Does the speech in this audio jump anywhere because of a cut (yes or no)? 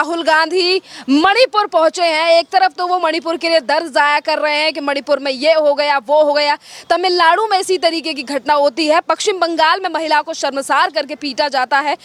no